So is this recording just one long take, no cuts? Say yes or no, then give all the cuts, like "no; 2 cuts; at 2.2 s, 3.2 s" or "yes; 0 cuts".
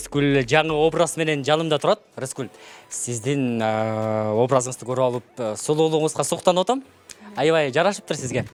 yes; 0 cuts